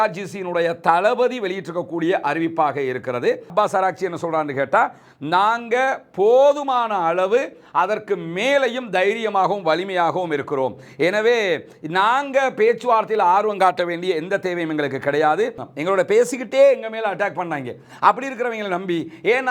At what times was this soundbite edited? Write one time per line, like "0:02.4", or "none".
0:03.5
0:15.6